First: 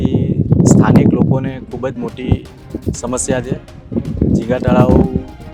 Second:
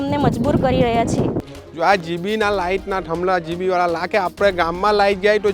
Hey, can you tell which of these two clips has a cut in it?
second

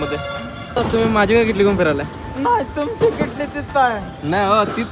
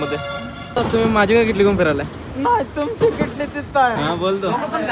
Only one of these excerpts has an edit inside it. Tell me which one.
second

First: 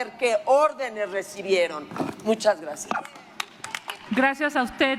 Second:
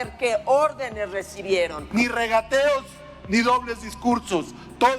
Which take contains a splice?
second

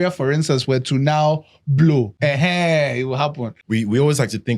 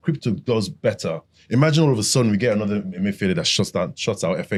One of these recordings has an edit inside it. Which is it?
first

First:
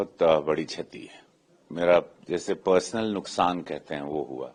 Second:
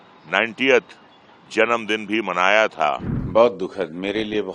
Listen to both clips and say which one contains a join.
second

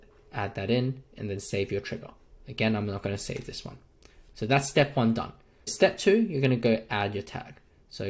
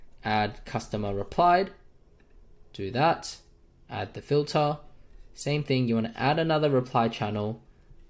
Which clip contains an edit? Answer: first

